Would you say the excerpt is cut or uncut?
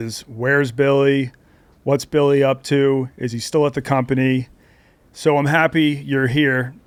uncut